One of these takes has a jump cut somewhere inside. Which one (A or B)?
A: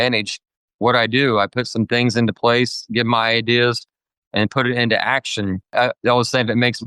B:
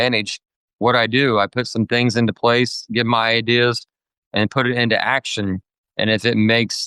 A